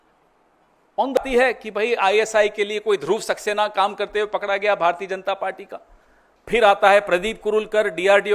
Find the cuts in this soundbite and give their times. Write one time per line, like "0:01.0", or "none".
0:01.2